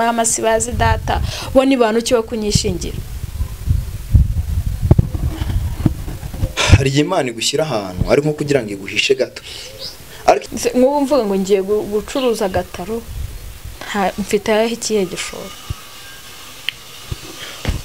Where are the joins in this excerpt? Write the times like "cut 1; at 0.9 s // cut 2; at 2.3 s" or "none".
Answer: cut 1; at 10.5 s